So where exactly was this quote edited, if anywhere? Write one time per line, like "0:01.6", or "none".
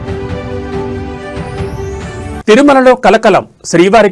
0:02.4

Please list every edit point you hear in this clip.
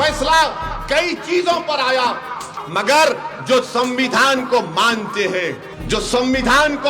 0:02.5
0:05.7

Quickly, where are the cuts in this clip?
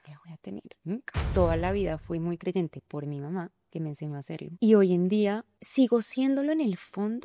0:01.2
0:04.5
0:05.5

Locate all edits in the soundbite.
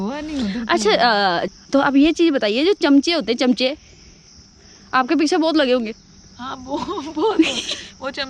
0:01.5

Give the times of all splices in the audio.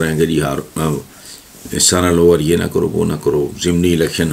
none

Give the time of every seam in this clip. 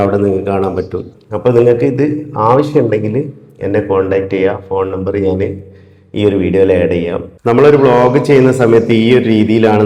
0:01.1
0:07.3

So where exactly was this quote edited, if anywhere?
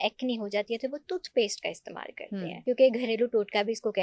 0:02.6

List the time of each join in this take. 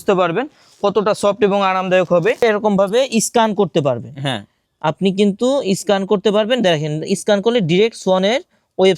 0:02.4

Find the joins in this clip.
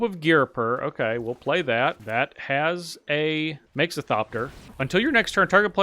0:02.0
0:03.6
0:04.6

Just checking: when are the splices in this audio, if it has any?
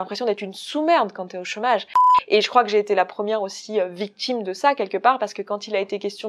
0:02.1

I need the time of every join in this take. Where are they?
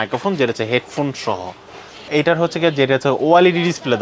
0:02.1

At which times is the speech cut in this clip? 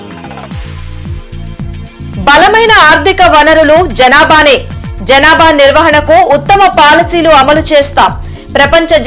0:01.9

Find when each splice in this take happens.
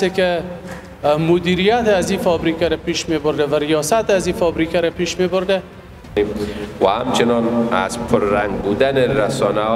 0:06.1

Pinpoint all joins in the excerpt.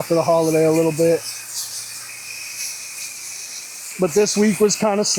none

